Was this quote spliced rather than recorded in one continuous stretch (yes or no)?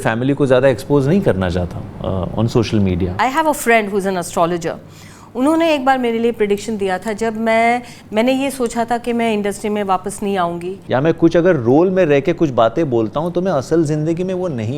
yes